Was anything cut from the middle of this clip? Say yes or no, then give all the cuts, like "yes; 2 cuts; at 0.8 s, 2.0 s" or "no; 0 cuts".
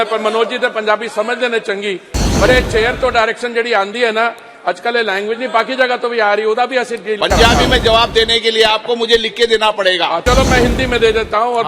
yes; 1 cut; at 10.2 s